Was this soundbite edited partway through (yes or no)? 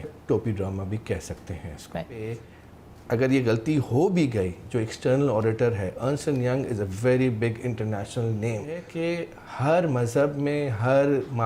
no